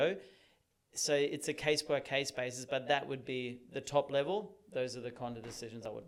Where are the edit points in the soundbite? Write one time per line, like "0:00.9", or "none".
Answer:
none